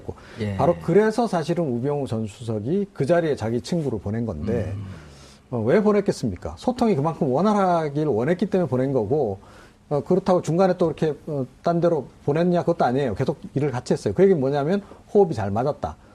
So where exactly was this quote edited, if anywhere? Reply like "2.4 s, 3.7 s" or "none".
9.1 s